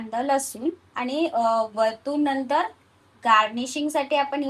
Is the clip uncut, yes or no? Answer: yes